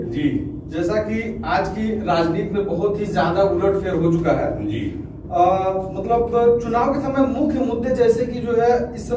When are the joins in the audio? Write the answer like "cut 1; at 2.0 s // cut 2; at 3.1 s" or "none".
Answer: none